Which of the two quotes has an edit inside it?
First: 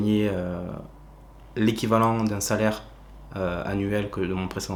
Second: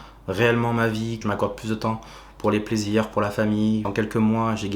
second; 2 cuts; at 1.2 s, 3.9 s

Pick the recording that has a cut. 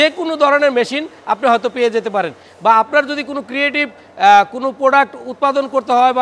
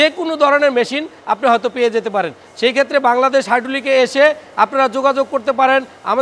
first; 1 cut; at 2.4 s

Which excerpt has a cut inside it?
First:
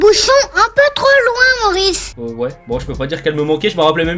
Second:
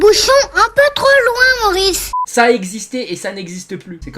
second; 1 cut; at 2.2 s

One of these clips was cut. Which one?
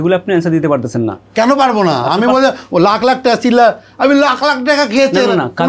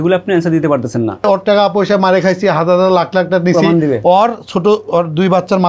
second; 1 cut; at 1.3 s

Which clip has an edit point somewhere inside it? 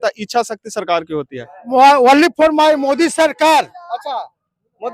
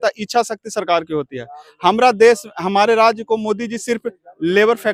first; 1 cut; at 1.5 s

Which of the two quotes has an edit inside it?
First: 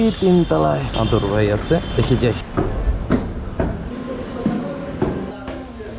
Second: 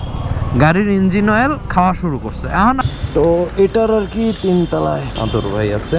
second; 1 cut; at 2.8 s

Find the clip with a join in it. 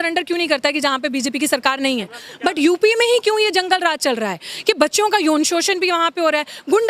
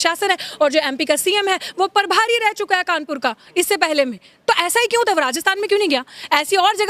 first; 1 cut; at 2.2 s

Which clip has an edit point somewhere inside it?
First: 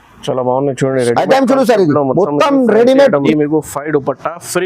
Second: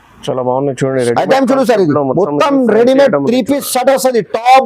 first; 1 cut; at 3.3 s

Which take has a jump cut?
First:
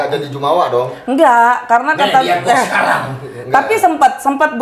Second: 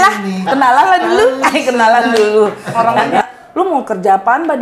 second; 1 cut; at 3.2 s

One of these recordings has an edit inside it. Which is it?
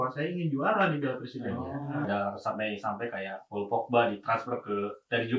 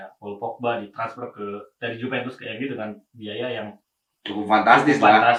first; 1 cut; at 2.1 s

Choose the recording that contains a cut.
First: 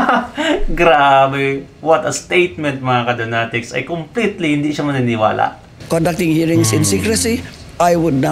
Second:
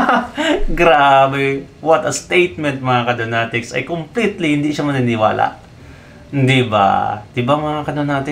first; 1 cut; at 5.8 s

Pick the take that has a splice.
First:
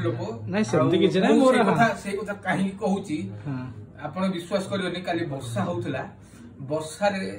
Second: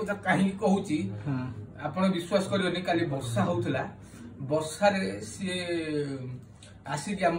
first; 1 cut; at 0.9 s

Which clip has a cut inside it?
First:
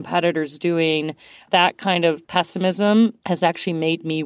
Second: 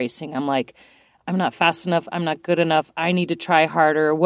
first; 3 cuts; at 1.3 s, 2.2 s, 3.2 s

